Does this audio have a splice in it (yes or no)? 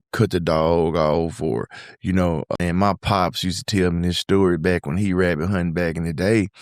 yes